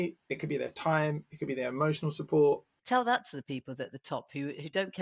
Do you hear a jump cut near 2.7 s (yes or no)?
yes